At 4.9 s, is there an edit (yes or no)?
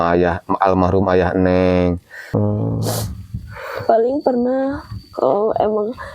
no